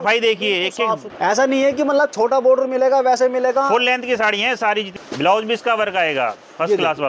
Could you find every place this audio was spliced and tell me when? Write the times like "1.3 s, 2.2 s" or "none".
1.1 s, 4.9 s